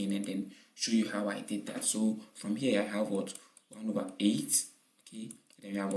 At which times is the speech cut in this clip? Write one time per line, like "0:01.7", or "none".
none